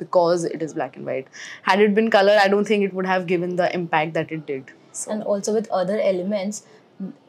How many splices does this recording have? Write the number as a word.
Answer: zero